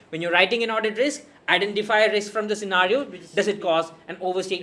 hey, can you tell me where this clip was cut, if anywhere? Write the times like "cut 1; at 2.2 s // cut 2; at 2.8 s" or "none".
cut 1; at 3.2 s